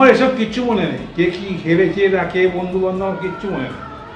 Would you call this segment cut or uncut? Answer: uncut